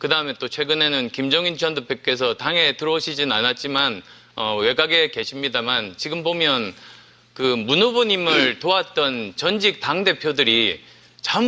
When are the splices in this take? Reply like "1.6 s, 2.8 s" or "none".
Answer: 3.9 s